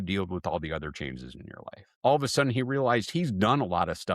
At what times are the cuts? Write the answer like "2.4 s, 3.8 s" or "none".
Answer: 1.9 s